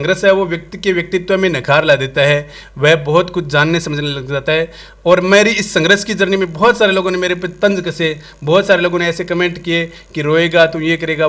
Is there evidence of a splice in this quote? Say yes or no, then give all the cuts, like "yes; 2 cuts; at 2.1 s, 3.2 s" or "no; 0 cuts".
no; 0 cuts